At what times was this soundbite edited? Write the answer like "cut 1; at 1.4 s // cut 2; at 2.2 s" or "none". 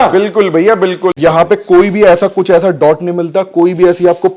cut 1; at 1.2 s

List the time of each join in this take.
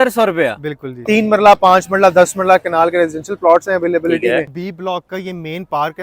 cut 1; at 1.0 s // cut 2; at 4.6 s

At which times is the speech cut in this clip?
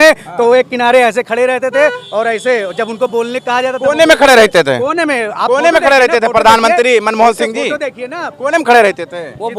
none

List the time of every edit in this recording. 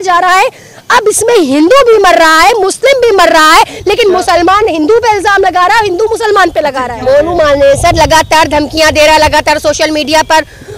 cut 1; at 6.9 s

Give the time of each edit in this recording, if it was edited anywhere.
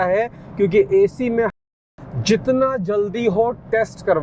cut 1; at 1.6 s

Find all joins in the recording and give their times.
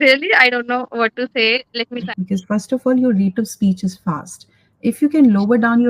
cut 1; at 2.0 s

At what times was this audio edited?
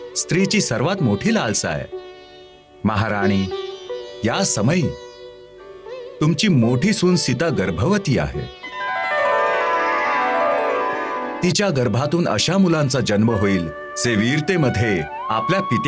none

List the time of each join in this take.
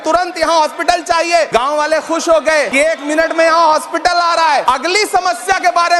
cut 1; at 1.5 s // cut 2; at 2.8 s // cut 3; at 4.6 s

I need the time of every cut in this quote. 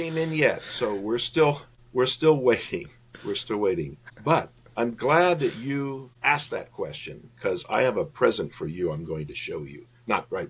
cut 1; at 1.7 s // cut 2; at 4.0 s // cut 3; at 6.1 s

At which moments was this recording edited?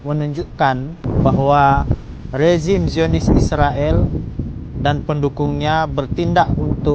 cut 1; at 1.1 s

